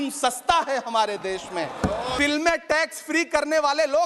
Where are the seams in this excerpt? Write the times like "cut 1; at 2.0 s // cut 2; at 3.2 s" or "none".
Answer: cut 1; at 2.1 s